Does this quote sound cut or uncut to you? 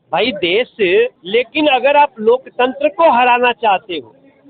cut